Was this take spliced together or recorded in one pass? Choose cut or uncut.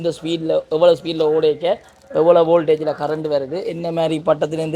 uncut